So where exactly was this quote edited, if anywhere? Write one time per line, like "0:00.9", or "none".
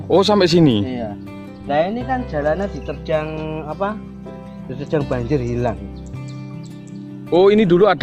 none